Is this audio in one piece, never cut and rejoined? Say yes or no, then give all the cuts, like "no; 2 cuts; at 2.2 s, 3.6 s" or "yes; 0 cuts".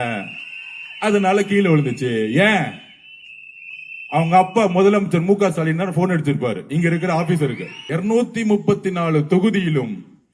no; 1 cut; at 7.7 s